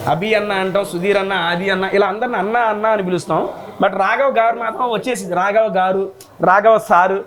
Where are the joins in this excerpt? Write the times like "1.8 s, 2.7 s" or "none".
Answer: none